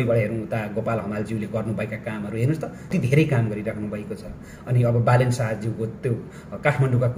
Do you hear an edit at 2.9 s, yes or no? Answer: yes